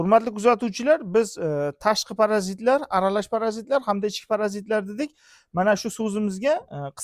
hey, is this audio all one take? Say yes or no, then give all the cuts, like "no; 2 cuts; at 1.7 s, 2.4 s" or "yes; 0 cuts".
yes; 0 cuts